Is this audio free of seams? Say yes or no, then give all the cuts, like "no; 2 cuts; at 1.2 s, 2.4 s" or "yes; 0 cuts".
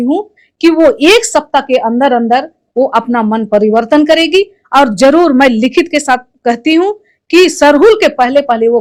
yes; 0 cuts